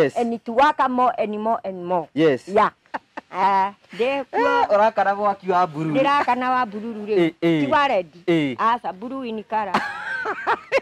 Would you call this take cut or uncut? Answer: cut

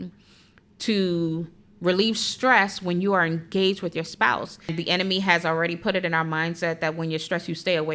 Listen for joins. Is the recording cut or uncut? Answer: cut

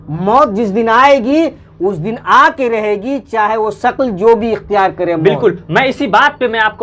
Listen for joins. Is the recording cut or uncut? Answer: uncut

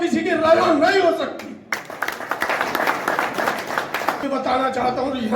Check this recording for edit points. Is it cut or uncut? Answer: cut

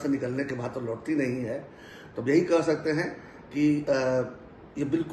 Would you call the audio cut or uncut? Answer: uncut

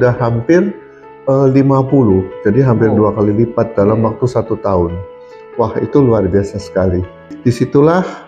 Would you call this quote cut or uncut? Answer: cut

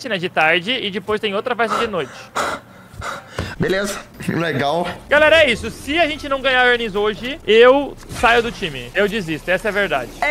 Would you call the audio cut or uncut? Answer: cut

